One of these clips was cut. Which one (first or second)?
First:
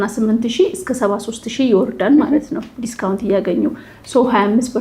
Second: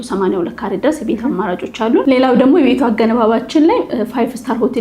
second